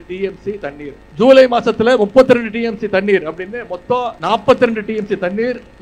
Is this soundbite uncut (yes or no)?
no